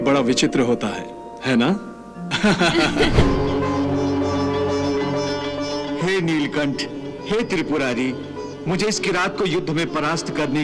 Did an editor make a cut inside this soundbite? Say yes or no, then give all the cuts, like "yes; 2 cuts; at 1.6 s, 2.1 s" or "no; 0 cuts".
yes; 1 cut; at 3.2 s